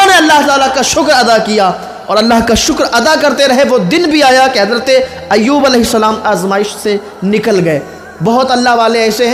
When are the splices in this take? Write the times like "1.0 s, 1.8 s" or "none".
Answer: none